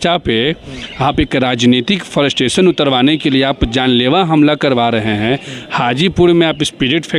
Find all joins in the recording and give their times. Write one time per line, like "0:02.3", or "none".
none